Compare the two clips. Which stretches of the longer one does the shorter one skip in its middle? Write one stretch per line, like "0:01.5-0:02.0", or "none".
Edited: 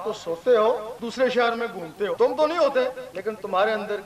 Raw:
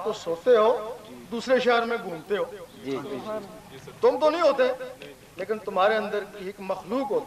0:01.0-0:01.3
0:02.5-0:04.0
0:04.9-0:05.3